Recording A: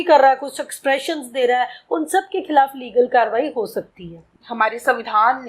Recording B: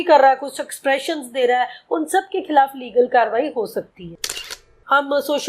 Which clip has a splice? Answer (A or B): B